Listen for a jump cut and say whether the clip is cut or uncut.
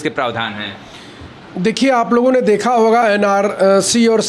uncut